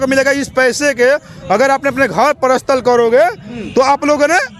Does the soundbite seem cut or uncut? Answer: uncut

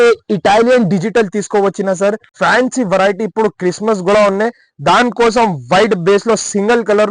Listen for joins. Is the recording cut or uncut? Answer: cut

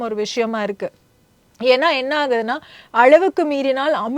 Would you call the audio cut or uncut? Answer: uncut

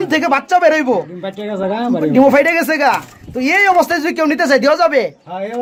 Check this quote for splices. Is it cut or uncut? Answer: uncut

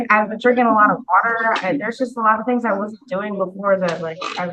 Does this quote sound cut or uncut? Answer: uncut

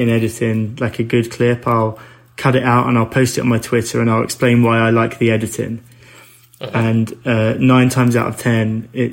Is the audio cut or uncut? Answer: uncut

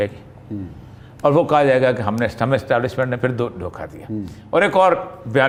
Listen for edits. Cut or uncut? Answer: uncut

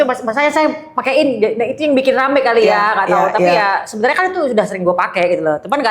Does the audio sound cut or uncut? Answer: uncut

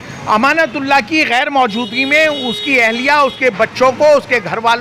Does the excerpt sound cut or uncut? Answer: uncut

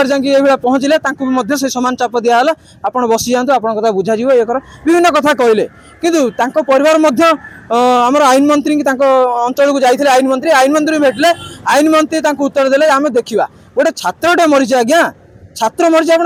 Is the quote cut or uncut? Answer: uncut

